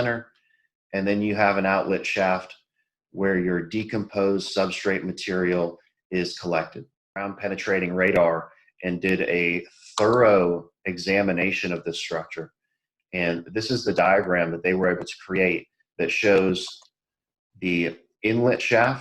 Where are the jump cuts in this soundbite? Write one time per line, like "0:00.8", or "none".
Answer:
0:07.3